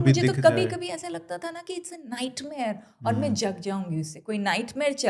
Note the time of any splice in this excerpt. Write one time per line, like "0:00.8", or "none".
none